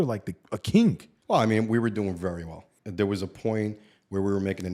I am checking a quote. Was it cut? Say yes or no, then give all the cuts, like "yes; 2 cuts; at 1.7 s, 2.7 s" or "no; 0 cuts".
yes; 2 cuts; at 1.1 s, 2.6 s